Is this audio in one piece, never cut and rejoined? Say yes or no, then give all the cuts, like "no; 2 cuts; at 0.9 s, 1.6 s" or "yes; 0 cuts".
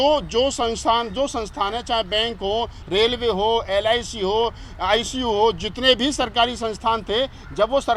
yes; 0 cuts